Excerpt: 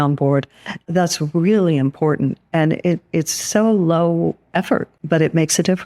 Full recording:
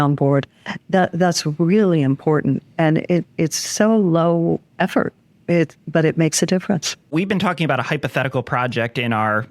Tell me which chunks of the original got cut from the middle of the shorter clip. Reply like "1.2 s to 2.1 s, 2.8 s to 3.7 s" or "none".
0.9 s to 1.1 s, 5.2 s to 5.8 s